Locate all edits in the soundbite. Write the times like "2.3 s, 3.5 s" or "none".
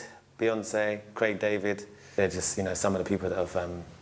2.0 s